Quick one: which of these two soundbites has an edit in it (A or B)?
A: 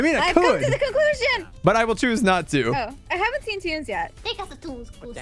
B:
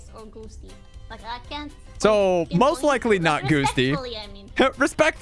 A